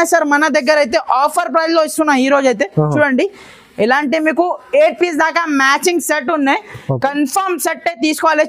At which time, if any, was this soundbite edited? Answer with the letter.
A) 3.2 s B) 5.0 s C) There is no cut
C